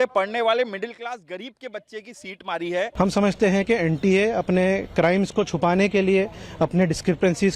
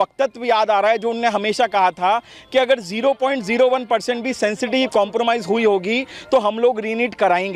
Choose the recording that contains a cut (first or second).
first